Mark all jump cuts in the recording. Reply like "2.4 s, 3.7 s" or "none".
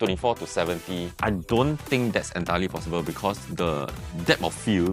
1.1 s